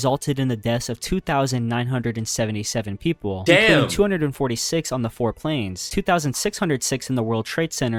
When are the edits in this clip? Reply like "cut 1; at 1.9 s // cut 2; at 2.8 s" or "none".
none